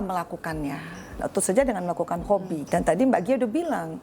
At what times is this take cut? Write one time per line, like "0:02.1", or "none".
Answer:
0:01.2
0:02.6